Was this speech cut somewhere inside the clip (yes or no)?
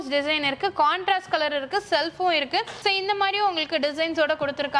no